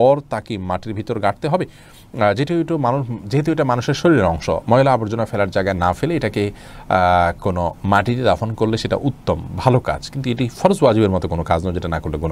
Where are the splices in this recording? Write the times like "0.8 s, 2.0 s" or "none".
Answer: none

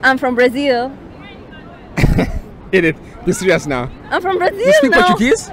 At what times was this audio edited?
none

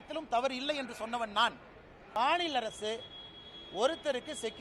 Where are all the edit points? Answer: 2.1 s

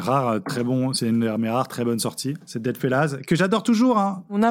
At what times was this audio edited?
2.5 s

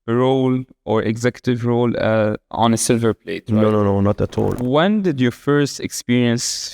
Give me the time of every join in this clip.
4.6 s

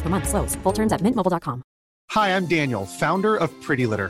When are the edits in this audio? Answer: 2.0 s

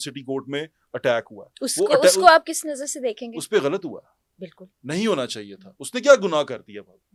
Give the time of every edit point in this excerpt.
none

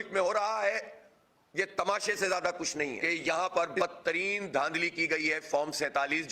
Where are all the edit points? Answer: 2.9 s

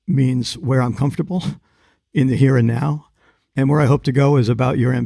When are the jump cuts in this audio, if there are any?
none

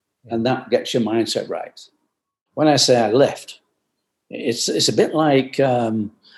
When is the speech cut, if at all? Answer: 2.4 s

